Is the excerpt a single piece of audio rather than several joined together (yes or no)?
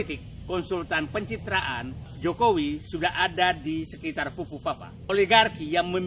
no